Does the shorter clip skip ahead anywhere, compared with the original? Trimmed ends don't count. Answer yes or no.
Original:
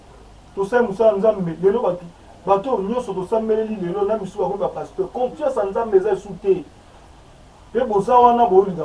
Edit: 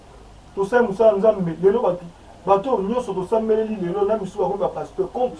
no